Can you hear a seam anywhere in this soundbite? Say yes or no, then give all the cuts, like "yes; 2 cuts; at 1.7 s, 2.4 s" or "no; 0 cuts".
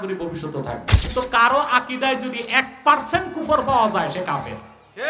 yes; 1 cut; at 1.1 s